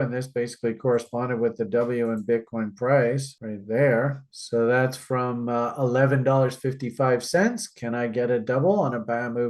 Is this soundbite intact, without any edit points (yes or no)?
no